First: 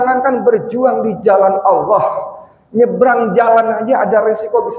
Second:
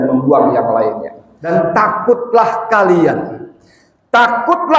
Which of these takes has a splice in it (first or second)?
second